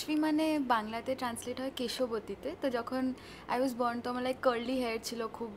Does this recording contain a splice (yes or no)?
no